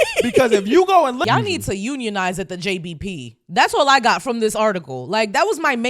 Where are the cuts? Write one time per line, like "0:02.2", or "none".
0:01.2